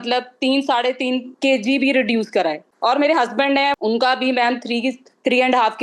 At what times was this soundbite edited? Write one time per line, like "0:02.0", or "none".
0:02.7
0:03.8